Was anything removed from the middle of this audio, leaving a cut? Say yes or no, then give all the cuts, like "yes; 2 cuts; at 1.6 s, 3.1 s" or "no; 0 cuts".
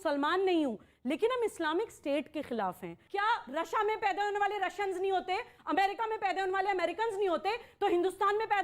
yes; 1 cut; at 3.0 s